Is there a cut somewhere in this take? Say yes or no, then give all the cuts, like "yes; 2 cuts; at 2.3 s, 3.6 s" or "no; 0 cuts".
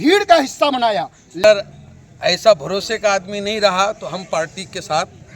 yes; 1 cut; at 1.4 s